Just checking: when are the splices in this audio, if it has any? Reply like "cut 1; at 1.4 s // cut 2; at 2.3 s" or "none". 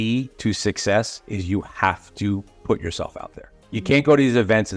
none